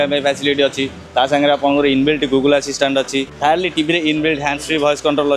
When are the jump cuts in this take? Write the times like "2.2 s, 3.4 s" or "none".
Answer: 1.0 s, 3.3 s